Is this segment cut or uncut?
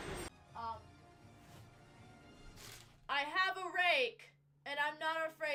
uncut